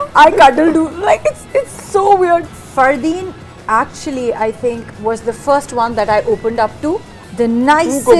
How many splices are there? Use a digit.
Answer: 2